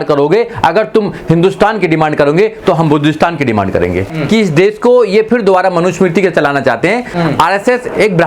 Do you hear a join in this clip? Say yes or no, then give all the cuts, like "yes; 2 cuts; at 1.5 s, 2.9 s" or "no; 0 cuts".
yes; 2 cuts; at 4.1 s, 7.1 s